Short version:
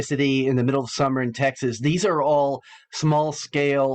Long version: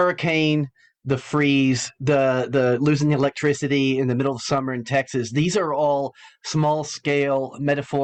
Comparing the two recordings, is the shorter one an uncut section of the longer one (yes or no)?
yes